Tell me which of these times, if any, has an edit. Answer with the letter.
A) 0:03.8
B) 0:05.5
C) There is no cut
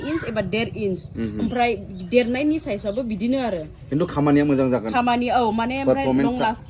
C